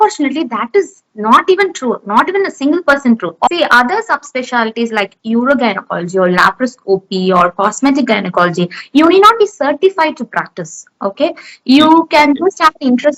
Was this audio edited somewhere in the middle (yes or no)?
yes